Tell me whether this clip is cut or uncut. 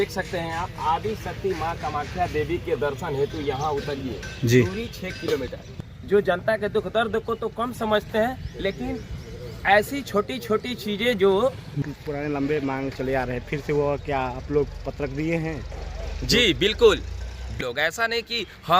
cut